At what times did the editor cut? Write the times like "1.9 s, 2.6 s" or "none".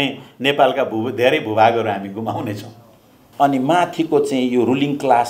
3.2 s